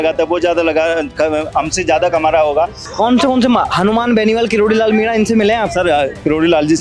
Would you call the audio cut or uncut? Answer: cut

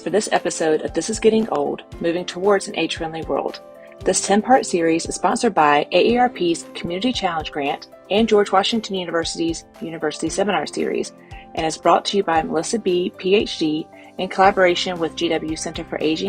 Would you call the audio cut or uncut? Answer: uncut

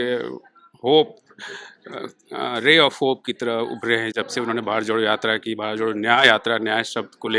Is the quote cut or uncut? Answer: uncut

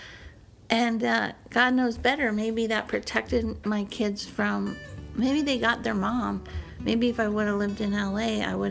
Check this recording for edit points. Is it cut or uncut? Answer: uncut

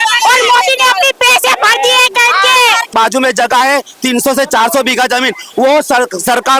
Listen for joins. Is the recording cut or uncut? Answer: cut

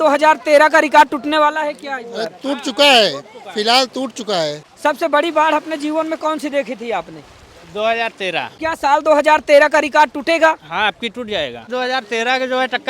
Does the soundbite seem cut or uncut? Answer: cut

